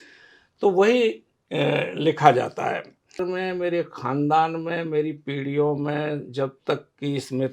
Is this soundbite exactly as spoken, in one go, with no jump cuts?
no; 1 cut; at 3.3 s

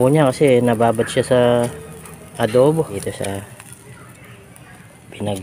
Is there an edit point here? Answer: yes; 1 cut; at 3.0 s

